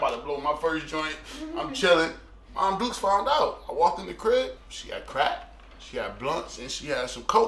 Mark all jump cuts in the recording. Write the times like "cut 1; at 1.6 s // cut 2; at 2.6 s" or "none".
cut 1; at 4.6 s